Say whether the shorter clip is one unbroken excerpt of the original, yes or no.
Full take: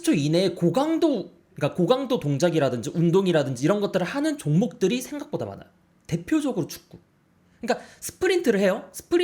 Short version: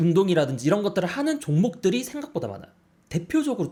yes